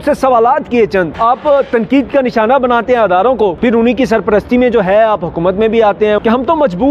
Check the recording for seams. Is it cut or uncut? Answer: cut